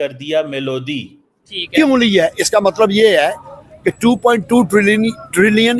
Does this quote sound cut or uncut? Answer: cut